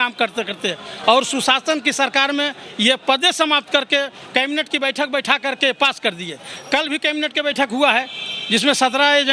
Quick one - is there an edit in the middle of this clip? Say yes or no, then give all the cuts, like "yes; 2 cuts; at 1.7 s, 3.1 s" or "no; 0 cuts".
no; 0 cuts